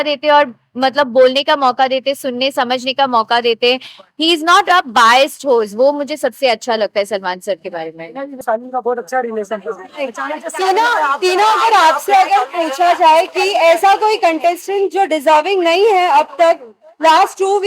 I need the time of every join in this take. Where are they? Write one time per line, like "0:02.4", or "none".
none